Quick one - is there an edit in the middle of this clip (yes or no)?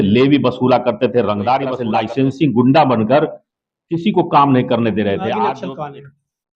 yes